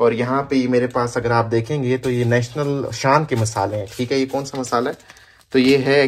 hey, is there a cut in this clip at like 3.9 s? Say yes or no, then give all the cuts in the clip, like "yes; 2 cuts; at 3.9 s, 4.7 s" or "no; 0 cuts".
no; 0 cuts